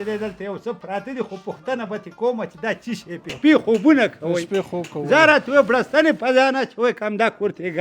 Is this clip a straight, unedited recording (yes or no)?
no